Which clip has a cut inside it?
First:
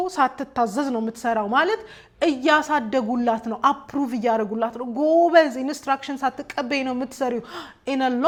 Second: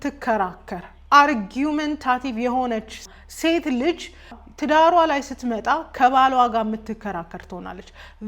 second; 2 cuts; at 3.1 s, 4.4 s

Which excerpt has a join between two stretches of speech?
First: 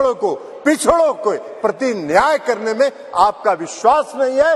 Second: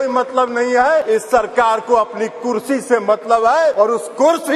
second; 2 cuts; at 1.0 s, 3.7 s

